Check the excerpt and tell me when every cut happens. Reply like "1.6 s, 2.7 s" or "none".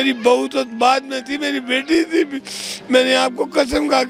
none